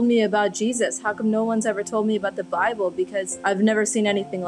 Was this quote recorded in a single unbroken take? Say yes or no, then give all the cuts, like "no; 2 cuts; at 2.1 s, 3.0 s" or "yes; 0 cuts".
no; 1 cut; at 3.3 s